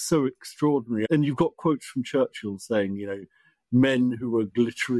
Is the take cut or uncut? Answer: cut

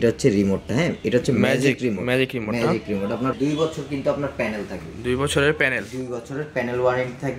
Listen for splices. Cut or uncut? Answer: cut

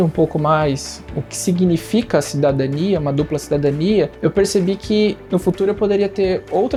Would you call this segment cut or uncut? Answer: uncut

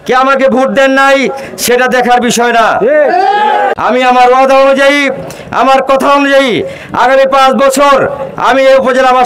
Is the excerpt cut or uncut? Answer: cut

